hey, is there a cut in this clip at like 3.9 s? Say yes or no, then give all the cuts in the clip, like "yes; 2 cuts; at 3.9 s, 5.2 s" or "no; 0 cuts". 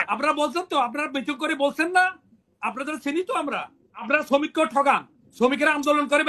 yes; 1 cut; at 3.9 s